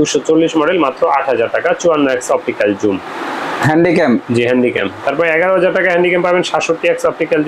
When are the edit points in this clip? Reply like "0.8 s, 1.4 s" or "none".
none